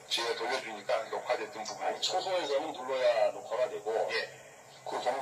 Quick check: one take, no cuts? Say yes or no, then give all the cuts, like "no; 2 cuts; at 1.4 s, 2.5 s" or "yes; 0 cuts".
yes; 0 cuts